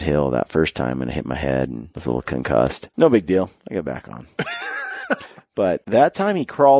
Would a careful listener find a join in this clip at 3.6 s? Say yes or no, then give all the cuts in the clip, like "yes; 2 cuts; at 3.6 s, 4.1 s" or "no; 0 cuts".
yes; 4 cuts; at 1.9 s, 2.8 s, 3.6 s, 5.4 s